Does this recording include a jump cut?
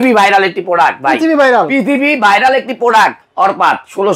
yes; 1 cut; at 3.2 s

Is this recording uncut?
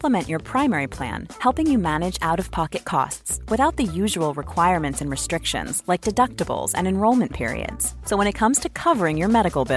yes; 0 cuts

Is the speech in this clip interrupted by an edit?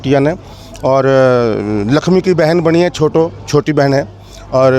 no; 0 cuts

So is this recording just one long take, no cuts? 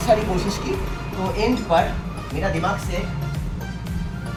yes; 0 cuts

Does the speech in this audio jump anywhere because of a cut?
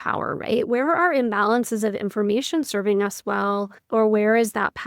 yes; 1 cut; at 3.9 s

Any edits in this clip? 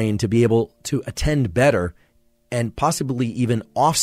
no; 0 cuts

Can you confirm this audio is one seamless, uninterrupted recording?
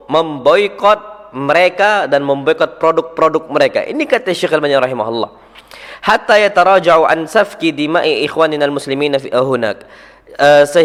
yes; 0 cuts

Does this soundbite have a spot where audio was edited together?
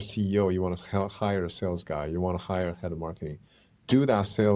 no; 0 cuts

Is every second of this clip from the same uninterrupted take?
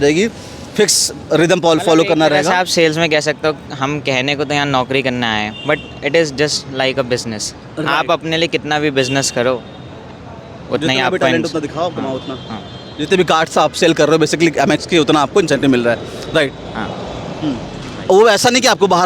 yes; 0 cuts

